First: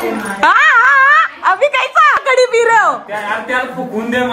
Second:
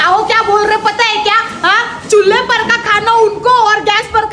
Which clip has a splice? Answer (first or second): first